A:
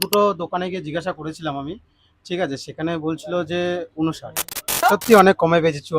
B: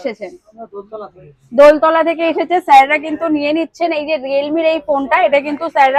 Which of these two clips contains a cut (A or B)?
A